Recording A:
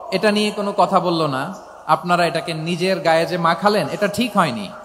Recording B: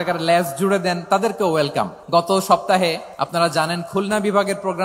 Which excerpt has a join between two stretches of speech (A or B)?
B